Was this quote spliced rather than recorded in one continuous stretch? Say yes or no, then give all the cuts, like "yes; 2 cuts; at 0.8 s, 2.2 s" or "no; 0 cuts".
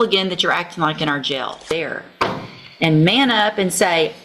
yes; 1 cut; at 1.7 s